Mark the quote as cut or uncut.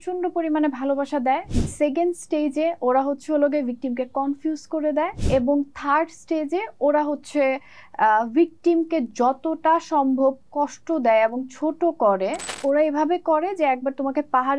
cut